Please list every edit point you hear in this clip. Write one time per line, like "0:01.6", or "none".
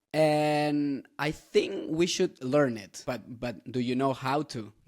0:03.0